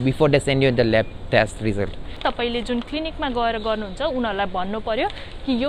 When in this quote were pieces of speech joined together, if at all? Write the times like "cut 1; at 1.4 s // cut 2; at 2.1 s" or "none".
cut 1; at 2.2 s